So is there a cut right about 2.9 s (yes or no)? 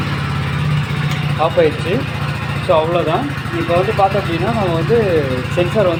no